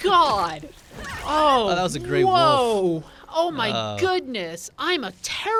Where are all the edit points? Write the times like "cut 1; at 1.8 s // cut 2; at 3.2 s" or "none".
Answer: none